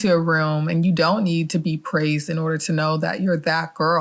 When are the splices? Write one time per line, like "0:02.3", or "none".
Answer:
none